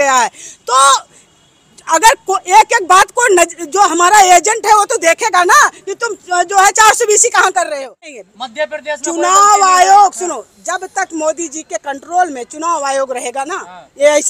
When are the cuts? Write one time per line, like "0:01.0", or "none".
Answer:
0:08.2